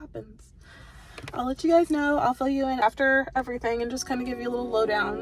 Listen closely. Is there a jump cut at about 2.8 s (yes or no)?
yes